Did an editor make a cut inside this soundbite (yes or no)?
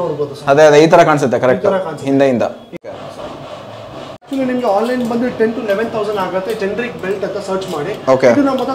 yes